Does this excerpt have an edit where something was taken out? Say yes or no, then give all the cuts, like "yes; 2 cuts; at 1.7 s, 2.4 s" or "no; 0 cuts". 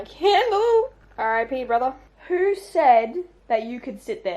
yes; 3 cuts; at 1.0 s, 2.1 s, 3.4 s